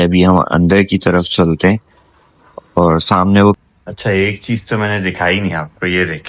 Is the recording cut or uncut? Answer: cut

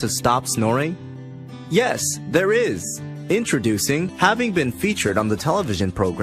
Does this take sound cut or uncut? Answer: cut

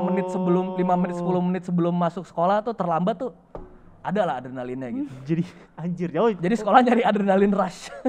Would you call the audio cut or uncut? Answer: uncut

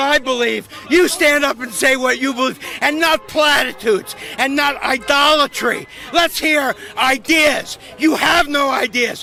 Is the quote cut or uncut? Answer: uncut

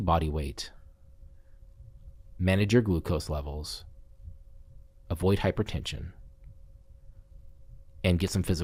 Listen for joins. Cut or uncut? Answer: uncut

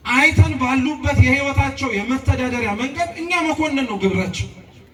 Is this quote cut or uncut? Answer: uncut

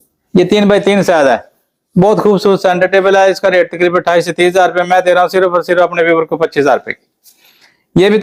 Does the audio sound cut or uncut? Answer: uncut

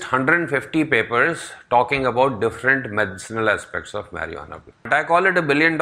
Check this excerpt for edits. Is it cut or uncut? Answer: cut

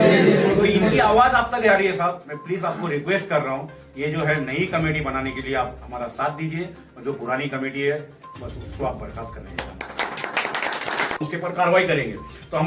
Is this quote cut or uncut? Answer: cut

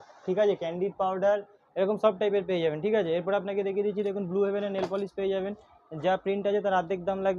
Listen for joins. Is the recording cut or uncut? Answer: uncut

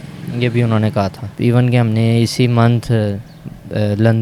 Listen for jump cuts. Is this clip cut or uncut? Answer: cut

